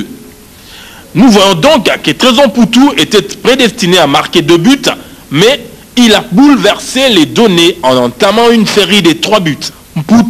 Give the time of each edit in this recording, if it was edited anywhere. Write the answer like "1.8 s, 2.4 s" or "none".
1.6 s